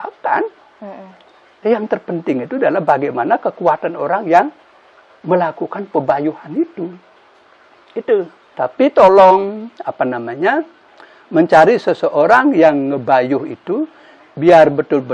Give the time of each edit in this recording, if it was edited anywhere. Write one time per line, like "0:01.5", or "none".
0:08.4